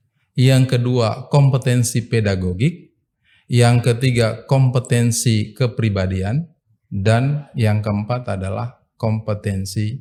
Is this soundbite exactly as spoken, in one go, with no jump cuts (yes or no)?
yes